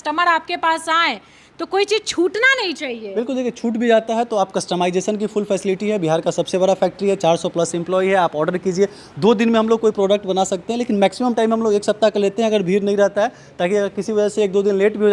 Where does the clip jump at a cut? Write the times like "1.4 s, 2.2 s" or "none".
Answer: none